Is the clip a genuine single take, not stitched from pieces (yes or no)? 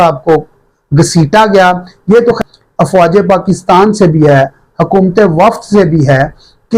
no